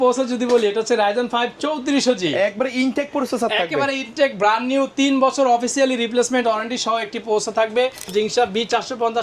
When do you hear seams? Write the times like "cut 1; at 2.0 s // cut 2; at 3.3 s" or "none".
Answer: cut 1; at 8.1 s